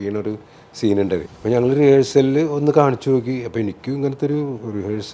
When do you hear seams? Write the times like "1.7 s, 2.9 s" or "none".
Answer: 1.2 s